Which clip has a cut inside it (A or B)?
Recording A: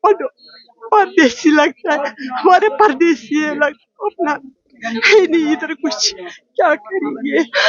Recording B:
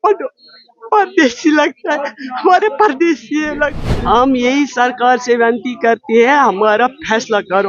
B